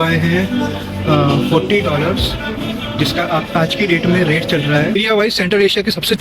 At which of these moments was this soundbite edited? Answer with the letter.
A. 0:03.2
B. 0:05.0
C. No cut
B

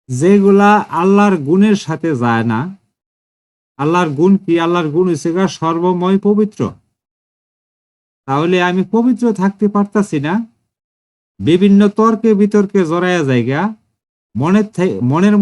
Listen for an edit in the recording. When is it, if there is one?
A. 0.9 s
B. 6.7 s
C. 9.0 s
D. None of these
A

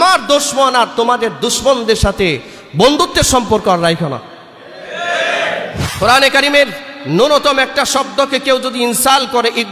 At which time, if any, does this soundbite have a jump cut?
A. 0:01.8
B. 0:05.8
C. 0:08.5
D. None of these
B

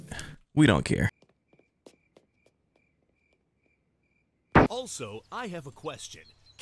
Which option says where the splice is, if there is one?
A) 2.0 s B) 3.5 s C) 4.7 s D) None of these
C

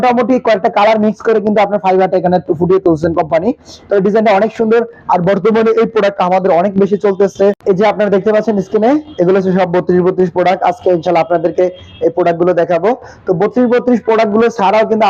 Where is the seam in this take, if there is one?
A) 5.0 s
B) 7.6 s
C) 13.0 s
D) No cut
B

